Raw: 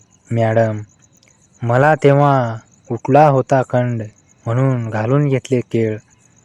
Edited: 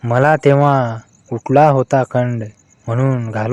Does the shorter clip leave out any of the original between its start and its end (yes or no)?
no